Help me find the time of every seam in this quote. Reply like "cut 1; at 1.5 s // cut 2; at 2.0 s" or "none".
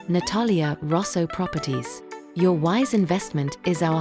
none